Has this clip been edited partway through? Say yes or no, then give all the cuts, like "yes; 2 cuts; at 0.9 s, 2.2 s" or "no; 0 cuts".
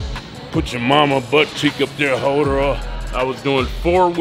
yes; 1 cut; at 3.0 s